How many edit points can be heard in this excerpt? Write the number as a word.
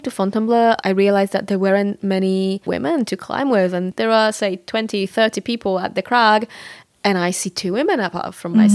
three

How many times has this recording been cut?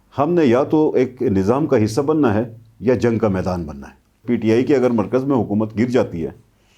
one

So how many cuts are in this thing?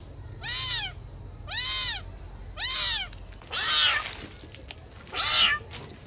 one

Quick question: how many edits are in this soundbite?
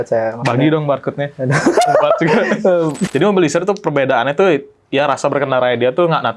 one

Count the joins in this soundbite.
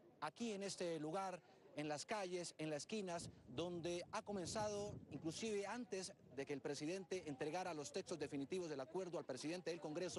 zero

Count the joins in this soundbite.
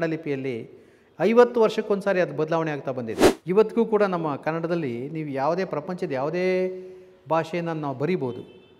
one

